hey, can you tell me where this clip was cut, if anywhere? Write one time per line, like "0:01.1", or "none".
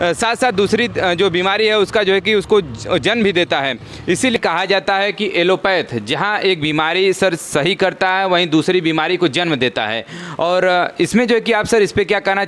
0:04.4